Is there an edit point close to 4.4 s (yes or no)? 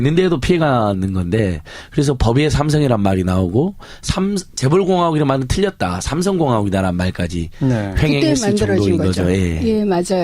yes